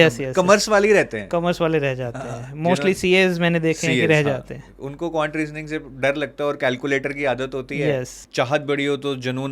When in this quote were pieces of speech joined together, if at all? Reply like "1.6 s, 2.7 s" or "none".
8.2 s